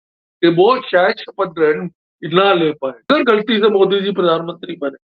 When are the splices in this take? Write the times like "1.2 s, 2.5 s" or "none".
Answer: 3.1 s